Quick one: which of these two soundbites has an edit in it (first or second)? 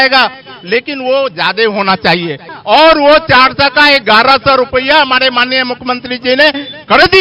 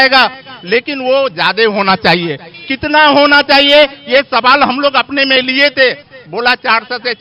first